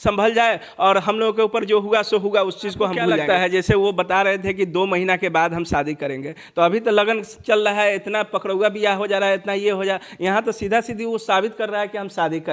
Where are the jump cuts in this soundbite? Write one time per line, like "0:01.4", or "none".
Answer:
0:03.2